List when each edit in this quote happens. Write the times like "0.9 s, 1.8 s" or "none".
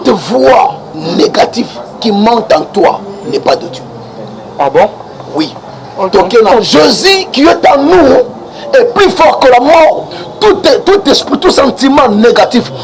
6.5 s